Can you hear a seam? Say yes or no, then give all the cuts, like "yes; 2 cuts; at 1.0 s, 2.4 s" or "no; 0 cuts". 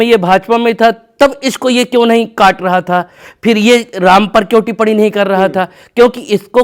no; 0 cuts